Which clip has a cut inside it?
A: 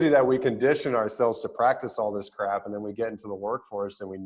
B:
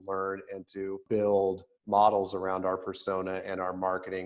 B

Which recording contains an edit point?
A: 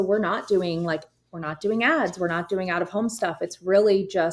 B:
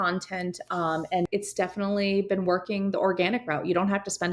B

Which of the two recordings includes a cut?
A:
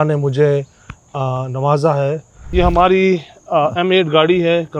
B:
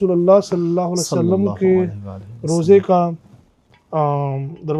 A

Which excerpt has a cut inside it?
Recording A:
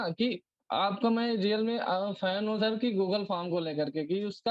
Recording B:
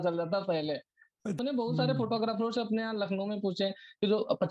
B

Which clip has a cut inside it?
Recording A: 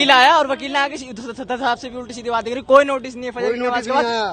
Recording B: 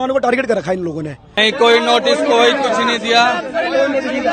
B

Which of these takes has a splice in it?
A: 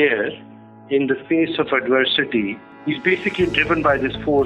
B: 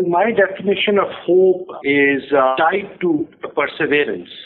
B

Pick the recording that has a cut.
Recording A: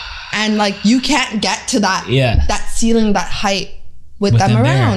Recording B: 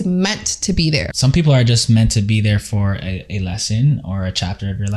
B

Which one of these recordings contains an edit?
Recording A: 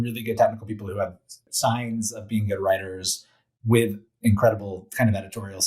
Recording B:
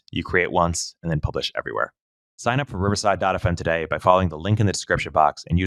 A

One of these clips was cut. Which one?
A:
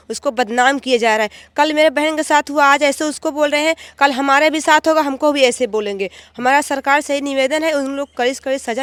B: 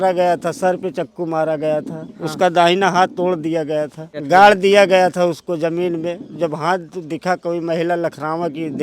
B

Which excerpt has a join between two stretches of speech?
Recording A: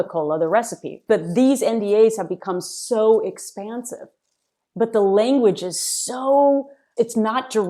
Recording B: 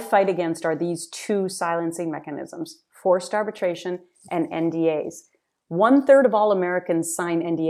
A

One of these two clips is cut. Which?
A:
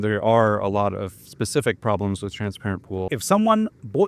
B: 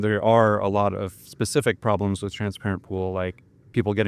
A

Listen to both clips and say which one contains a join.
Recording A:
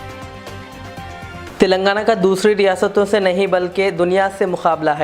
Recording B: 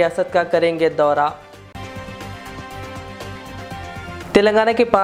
A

